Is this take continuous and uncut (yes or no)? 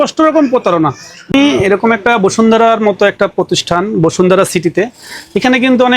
no